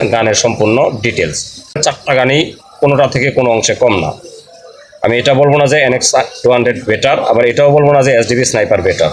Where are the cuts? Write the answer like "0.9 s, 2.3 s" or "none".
1.7 s